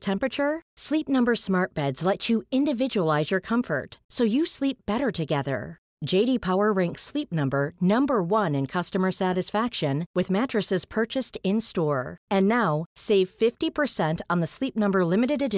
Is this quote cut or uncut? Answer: uncut